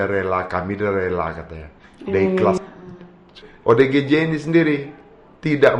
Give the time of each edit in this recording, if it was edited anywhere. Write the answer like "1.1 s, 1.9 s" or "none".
2.6 s